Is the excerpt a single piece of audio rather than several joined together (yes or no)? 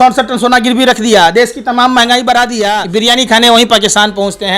no